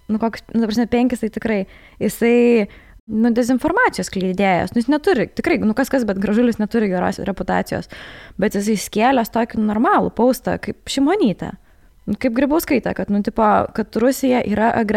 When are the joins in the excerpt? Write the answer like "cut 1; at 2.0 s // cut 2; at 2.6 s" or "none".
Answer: cut 1; at 3.1 s // cut 2; at 7.2 s